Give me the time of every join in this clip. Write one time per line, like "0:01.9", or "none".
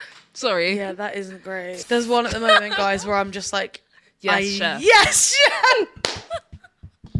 0:01.8